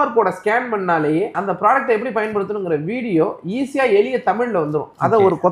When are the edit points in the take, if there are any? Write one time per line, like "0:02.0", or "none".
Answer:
0:01.4